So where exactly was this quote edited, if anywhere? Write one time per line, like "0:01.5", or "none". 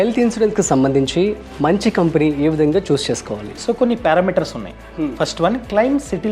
none